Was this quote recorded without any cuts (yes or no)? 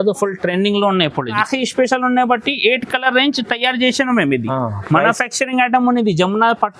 no